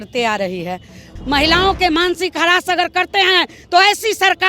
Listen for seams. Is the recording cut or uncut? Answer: cut